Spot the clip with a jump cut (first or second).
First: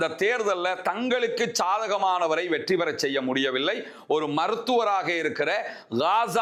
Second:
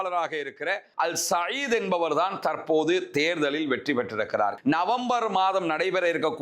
second